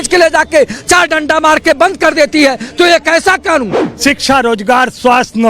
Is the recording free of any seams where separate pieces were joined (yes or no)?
no